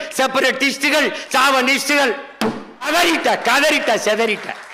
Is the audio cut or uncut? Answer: cut